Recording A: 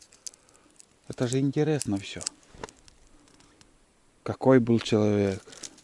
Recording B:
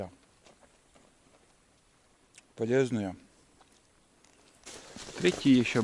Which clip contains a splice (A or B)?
B